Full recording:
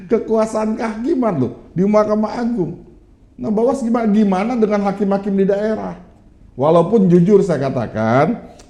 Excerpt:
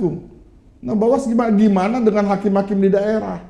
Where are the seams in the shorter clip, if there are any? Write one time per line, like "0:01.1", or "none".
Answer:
none

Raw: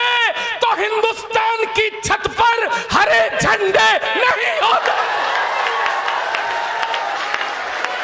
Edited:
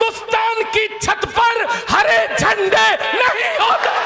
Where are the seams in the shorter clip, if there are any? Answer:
none

